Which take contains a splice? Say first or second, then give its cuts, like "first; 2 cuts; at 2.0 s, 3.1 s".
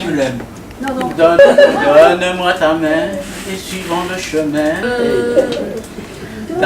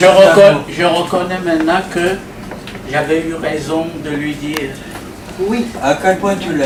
first; 2 cuts; at 1.4 s, 4.8 s